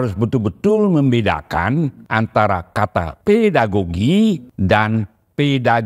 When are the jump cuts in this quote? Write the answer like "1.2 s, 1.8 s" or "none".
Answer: 2.0 s, 3.1 s, 4.5 s

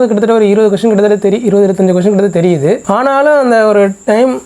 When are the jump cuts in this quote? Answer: 2.8 s

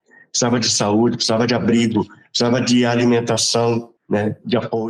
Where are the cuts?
4.0 s

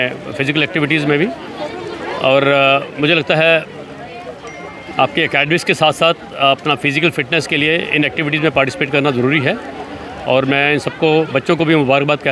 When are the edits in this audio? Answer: none

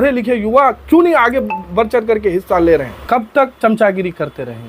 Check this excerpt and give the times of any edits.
2.9 s

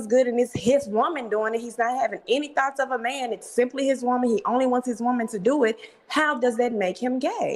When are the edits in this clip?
none

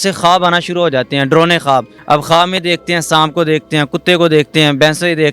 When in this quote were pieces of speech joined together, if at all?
1.9 s

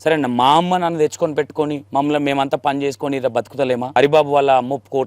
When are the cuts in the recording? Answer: 1.8 s, 4.0 s

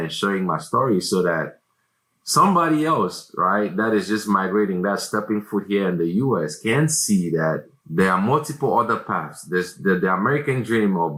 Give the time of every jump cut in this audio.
none

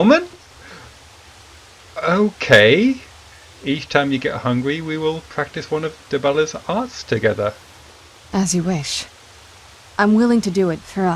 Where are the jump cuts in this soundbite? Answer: none

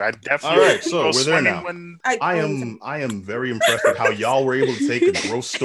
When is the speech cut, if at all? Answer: 1.9 s

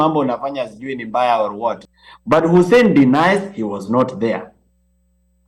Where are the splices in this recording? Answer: 1.8 s

